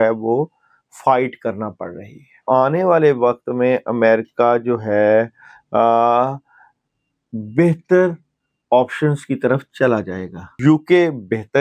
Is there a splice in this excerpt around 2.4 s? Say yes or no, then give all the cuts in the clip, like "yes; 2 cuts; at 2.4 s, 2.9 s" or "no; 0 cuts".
yes; 2 cuts; at 2.4 s, 10.6 s